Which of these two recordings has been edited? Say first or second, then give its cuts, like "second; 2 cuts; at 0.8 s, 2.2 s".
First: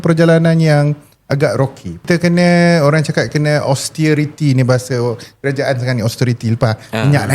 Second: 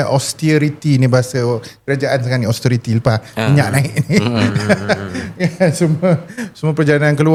first; 1 cut; at 2.1 s